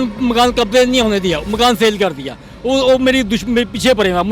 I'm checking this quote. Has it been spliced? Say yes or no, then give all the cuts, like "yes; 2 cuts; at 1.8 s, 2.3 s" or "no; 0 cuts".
no; 0 cuts